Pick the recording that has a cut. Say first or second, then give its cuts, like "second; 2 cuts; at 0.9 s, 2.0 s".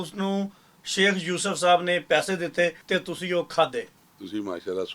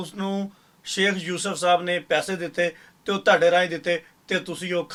first; 2 cuts; at 2.9 s, 4.0 s